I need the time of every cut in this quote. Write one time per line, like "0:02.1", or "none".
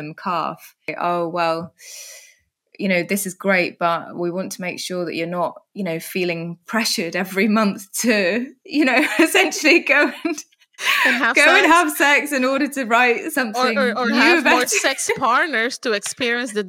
0:00.9